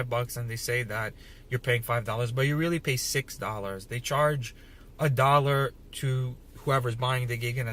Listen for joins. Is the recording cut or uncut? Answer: uncut